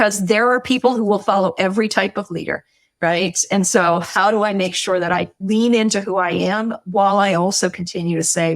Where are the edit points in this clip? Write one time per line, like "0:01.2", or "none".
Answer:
0:05.4